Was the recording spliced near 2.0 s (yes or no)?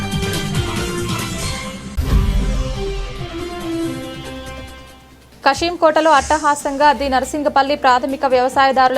yes